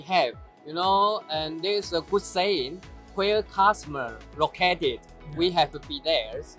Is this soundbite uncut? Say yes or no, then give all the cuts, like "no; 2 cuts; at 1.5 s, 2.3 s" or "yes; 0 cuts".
yes; 0 cuts